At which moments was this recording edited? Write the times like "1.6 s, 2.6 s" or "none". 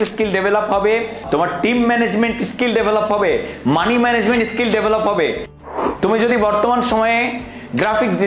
1.1 s, 5.6 s